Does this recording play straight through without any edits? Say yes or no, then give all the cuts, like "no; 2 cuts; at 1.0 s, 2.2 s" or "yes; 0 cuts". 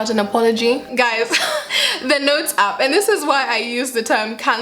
no; 2 cuts; at 0.9 s, 1.8 s